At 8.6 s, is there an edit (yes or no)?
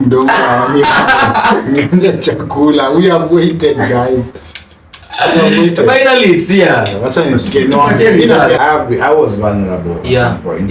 yes